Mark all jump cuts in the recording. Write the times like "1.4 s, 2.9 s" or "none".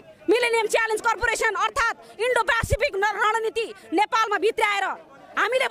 none